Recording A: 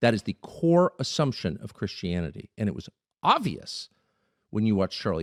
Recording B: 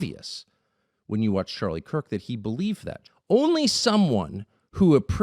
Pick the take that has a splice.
B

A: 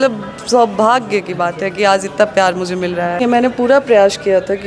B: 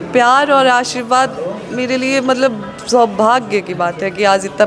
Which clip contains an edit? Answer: A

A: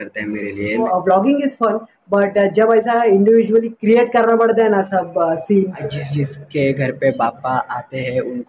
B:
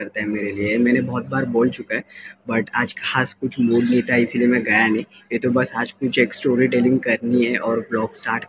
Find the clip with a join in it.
A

